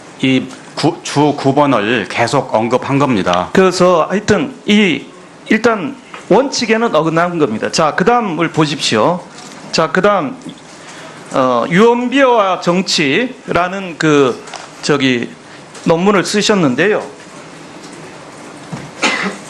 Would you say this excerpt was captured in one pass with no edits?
yes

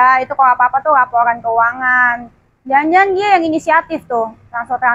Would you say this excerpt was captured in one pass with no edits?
yes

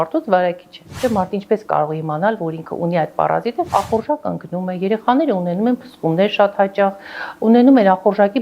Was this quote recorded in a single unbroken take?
no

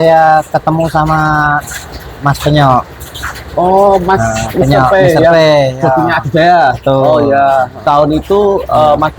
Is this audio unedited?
no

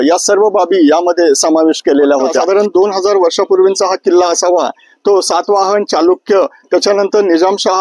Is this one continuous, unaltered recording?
no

